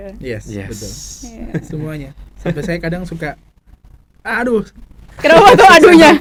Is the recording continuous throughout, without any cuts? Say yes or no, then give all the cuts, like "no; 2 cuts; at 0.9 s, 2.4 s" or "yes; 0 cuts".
yes; 0 cuts